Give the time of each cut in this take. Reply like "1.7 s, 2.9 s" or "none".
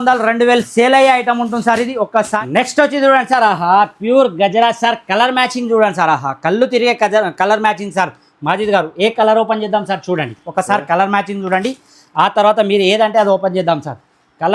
2.3 s